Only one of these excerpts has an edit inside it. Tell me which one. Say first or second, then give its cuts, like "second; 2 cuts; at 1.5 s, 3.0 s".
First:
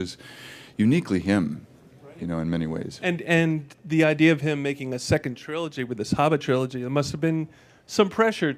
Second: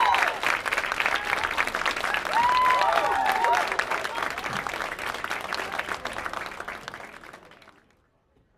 second; 1 cut; at 2.0 s